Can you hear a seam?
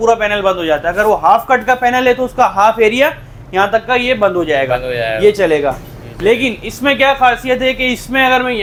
no; 0 cuts

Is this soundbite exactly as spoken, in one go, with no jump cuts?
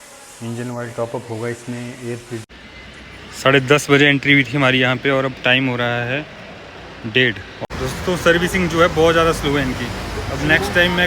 no; 2 cuts; at 2.7 s, 7.6 s

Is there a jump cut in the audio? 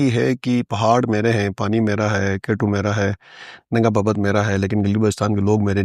no; 0 cuts

